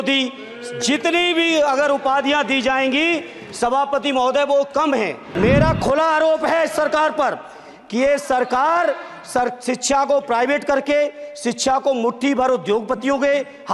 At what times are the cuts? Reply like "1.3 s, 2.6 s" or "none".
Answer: 5.2 s